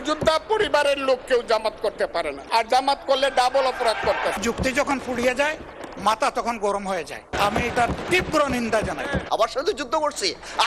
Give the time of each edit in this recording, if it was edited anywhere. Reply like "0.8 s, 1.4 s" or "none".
4.4 s, 7.1 s